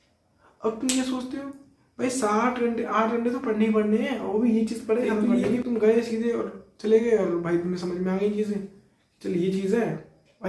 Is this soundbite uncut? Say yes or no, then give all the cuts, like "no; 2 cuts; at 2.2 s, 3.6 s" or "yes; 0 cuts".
no; 1 cut; at 5.2 s